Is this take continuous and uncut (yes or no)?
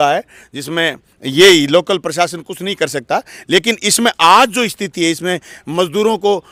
yes